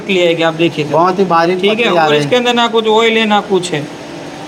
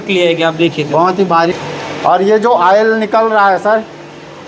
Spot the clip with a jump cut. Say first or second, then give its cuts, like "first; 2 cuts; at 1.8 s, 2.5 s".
second; 1 cut; at 1.5 s